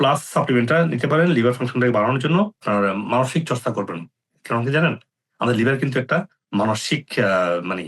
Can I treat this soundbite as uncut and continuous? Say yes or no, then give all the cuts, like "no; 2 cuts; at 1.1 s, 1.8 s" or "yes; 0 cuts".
no; 1 cut; at 2.6 s